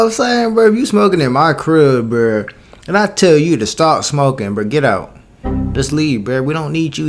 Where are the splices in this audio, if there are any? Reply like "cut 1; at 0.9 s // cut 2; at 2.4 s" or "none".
none